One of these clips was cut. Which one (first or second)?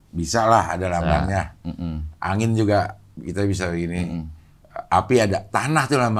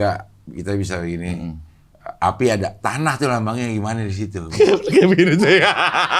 second